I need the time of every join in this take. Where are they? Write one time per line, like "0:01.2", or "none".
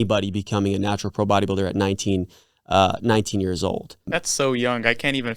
0:04.2